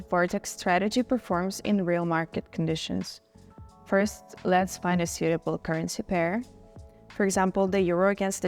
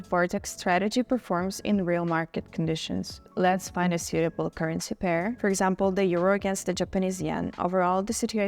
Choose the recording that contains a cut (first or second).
second